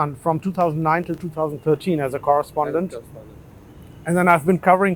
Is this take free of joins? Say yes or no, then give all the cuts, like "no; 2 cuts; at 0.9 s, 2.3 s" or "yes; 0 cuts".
yes; 0 cuts